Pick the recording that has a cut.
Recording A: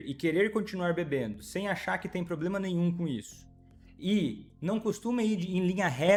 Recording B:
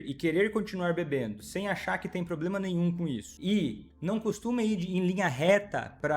B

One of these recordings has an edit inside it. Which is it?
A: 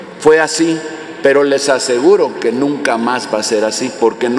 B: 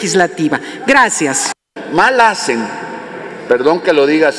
B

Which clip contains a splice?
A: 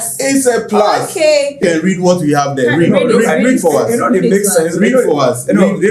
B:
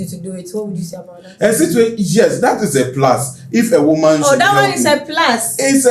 A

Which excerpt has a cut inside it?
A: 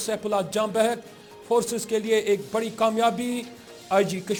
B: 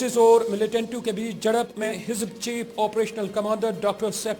B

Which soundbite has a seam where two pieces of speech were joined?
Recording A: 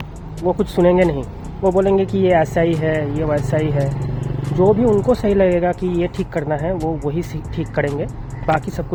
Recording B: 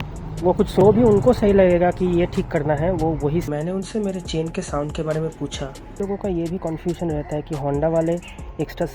B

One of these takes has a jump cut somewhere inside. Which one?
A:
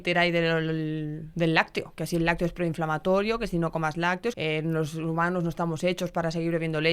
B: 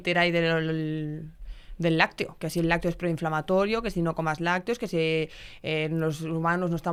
A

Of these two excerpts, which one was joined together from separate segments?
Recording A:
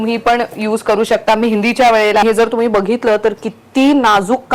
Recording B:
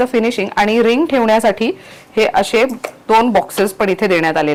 A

